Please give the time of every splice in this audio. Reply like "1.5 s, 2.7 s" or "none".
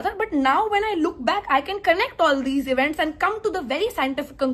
none